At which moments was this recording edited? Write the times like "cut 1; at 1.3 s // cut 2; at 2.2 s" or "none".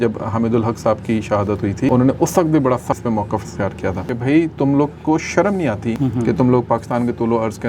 cut 1; at 1.9 s // cut 2; at 3.0 s // cut 3; at 4.1 s // cut 4; at 6.0 s